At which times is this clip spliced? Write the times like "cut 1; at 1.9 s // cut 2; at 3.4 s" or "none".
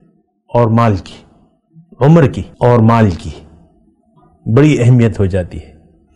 cut 1; at 2.4 s